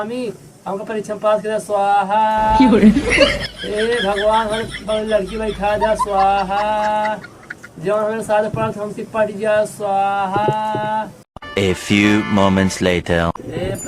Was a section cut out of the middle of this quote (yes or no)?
yes